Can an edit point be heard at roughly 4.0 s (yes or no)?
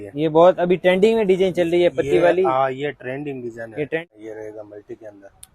yes